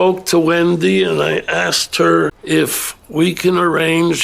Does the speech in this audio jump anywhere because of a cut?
yes; 1 cut; at 2.4 s

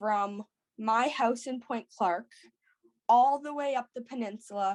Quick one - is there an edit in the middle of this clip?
no; 0 cuts

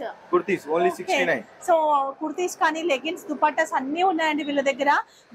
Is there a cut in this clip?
no; 0 cuts

